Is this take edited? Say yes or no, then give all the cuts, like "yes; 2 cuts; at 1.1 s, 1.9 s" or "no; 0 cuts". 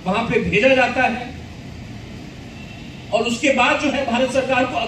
no; 0 cuts